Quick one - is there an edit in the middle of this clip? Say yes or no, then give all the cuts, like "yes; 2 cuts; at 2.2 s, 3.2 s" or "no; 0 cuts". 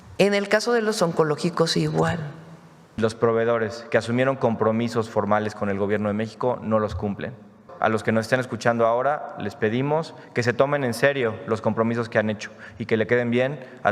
yes; 2 cuts; at 3.0 s, 7.6 s